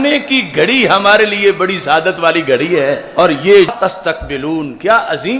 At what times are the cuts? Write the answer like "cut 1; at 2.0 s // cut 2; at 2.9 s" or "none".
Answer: cut 1; at 3.7 s